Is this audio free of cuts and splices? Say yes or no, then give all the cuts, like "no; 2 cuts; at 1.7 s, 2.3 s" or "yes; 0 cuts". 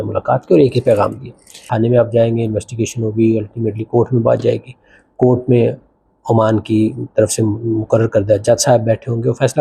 no; 1 cut; at 1.6 s